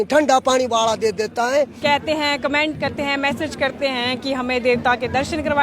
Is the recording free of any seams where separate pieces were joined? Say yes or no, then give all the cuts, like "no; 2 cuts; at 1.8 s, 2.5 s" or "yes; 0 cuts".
no; 1 cut; at 1.7 s